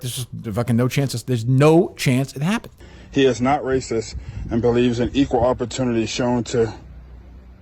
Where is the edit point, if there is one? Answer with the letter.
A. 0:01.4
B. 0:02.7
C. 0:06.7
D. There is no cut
B